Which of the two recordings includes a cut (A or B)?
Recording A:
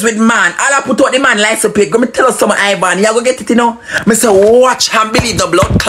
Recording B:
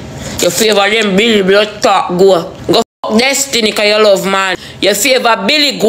B